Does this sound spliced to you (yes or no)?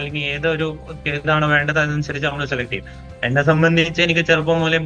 no